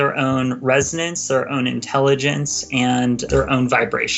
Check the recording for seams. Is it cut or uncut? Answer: cut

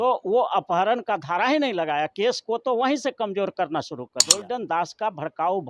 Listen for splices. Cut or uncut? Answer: cut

